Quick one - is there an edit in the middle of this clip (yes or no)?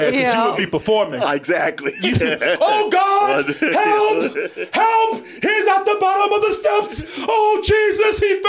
no